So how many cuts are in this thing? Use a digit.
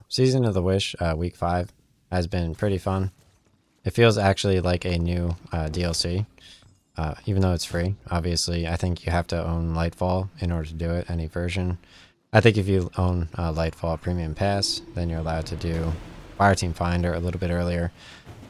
0